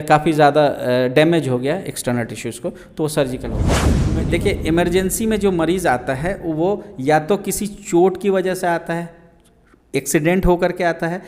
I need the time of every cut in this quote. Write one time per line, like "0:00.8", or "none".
0:03.8